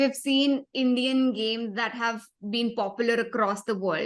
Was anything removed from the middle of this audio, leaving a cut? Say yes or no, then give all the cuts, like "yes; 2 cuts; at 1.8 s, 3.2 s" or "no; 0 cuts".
no; 0 cuts